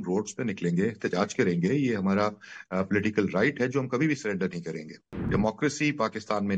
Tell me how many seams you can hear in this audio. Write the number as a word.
one